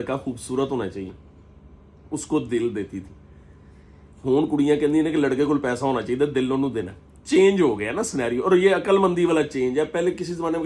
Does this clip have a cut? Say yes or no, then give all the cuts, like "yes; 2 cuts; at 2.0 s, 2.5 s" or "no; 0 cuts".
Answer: no; 0 cuts